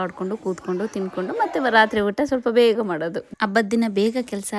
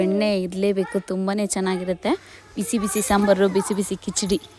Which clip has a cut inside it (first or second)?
first